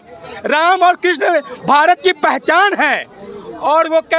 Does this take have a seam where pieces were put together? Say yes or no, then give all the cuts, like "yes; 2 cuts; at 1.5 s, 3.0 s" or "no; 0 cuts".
no; 0 cuts